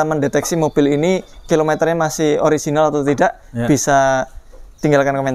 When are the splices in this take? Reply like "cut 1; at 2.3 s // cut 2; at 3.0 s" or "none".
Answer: none